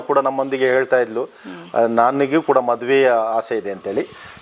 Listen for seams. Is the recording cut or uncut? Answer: uncut